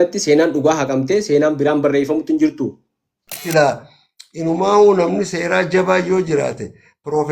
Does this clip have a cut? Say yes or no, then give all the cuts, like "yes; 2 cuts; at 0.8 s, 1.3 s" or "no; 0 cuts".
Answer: yes; 1 cut; at 3.4 s